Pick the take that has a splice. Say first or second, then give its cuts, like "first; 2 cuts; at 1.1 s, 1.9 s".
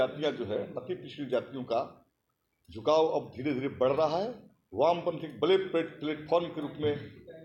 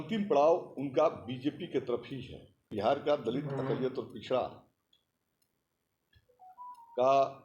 second; 1 cut; at 2.6 s